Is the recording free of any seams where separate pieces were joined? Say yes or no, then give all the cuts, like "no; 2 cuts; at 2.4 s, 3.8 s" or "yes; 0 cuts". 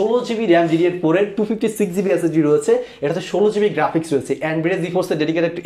yes; 0 cuts